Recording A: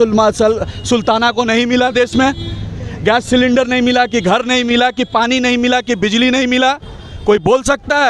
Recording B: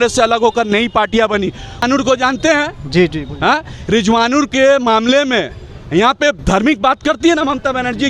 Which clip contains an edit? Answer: B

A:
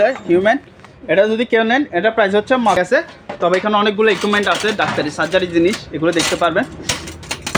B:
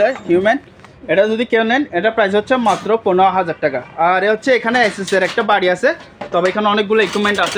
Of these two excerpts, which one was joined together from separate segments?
A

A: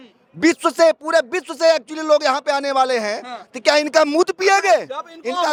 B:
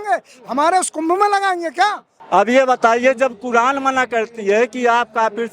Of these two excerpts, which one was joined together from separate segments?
B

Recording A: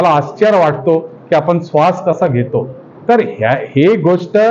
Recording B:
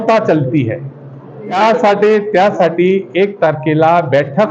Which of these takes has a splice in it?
B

